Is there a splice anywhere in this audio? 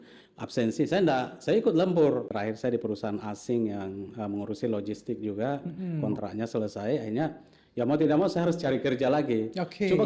yes; 1 cut; at 2.3 s

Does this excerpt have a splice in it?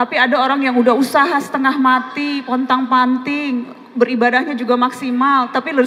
no; 0 cuts

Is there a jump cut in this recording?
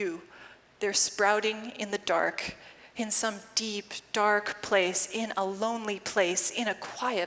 no; 0 cuts

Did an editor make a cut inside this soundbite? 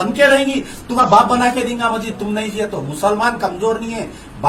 yes; 1 cut; at 1.0 s

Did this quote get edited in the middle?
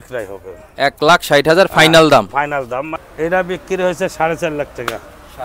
yes; 1 cut; at 3.0 s

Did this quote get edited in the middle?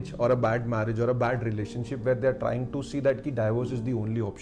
no; 0 cuts

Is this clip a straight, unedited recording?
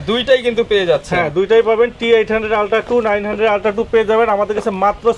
yes; 0 cuts

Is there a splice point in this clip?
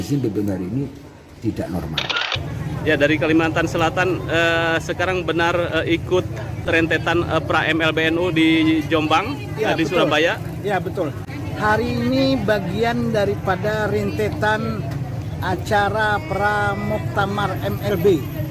yes; 1 cut; at 2.3 s

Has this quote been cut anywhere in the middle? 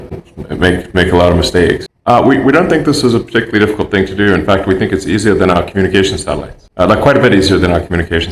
yes; 1 cut; at 1.9 s

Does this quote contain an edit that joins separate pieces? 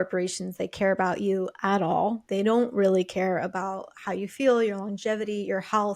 yes; 1 cut; at 2.2 s

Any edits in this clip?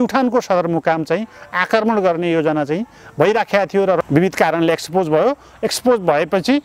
yes; 1 cut; at 4.0 s

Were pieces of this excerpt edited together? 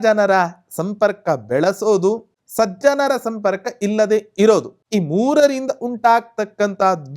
yes; 2 cuts; at 2.4 s, 4.8 s

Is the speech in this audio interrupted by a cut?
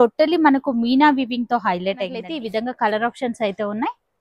yes; 1 cut; at 2.2 s

